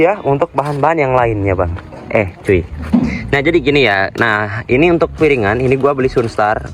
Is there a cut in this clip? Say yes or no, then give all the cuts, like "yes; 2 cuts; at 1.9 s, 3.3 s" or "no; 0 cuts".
no; 0 cuts